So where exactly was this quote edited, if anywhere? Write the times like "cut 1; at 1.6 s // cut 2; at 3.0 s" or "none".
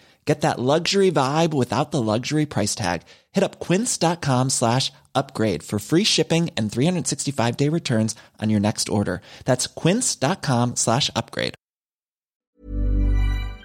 cut 1; at 12.4 s